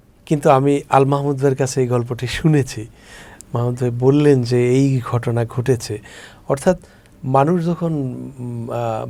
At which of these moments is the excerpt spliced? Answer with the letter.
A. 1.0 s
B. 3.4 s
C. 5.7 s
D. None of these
D